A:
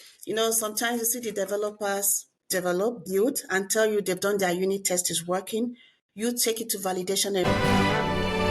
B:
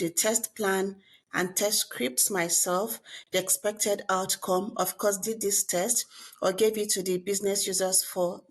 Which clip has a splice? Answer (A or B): A